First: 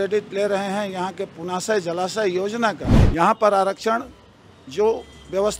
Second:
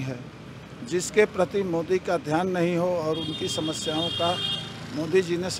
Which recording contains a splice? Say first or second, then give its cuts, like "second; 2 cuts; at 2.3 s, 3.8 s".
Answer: first; 1 cut; at 2.9 s